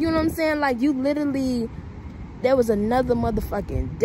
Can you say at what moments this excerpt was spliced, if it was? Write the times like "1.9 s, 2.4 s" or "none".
none